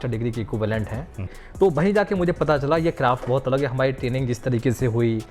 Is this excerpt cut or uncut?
cut